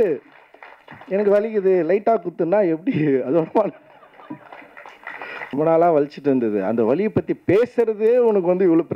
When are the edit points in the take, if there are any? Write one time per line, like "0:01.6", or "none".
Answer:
0:05.5